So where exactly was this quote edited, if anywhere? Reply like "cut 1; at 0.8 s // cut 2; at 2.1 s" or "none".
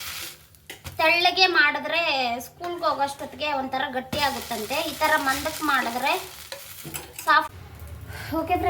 cut 1; at 7.5 s